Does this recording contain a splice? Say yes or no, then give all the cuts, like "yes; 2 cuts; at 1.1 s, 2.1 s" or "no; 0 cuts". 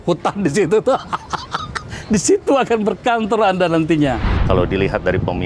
yes; 1 cut; at 4.3 s